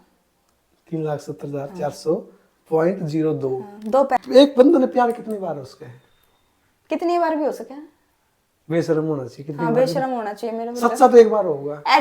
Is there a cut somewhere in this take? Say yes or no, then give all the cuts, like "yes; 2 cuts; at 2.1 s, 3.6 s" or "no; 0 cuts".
yes; 1 cut; at 4.2 s